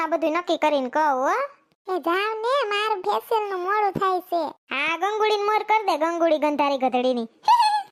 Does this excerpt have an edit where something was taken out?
no; 0 cuts

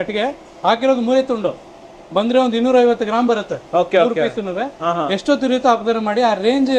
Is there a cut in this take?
no; 0 cuts

